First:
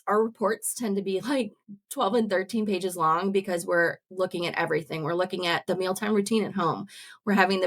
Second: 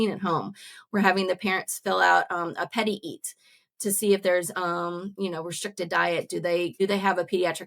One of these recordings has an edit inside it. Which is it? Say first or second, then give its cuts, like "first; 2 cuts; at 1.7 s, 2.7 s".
second; 1 cut; at 6.7 s